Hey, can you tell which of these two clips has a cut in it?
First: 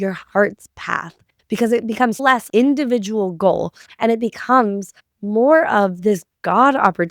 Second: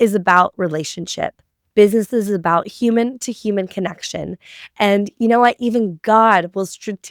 first; 3 cuts; at 1.3 s, 2.2 s, 3.8 s

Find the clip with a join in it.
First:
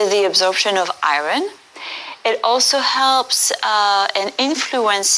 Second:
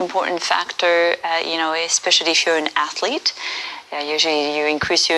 first; 1 cut; at 2.4 s

